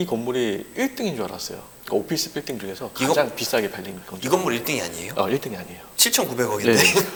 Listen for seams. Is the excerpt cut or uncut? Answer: uncut